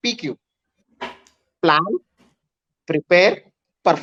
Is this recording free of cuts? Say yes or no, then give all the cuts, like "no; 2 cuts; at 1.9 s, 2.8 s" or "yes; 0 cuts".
yes; 0 cuts